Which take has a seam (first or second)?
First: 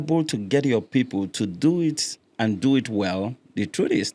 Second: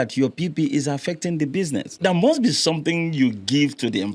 second